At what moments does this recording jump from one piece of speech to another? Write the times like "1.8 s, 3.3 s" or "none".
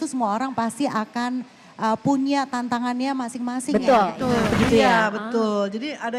4.5 s